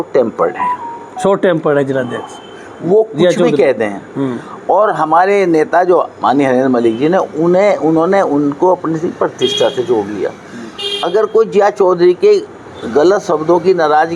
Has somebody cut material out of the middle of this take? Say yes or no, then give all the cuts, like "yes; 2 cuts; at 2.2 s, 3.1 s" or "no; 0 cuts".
no; 0 cuts